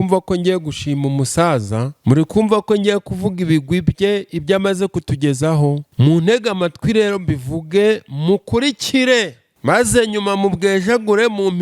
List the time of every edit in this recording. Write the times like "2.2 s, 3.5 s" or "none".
1.9 s, 5.9 s, 9.4 s

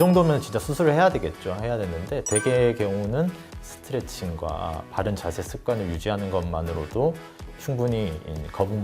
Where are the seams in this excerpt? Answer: 7.5 s

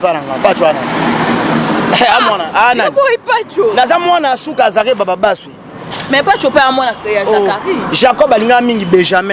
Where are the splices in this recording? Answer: none

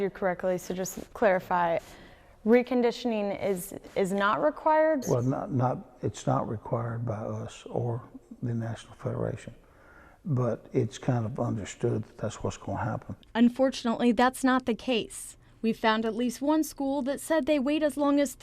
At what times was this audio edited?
1.0 s, 1.9 s, 5.0 s, 13.2 s

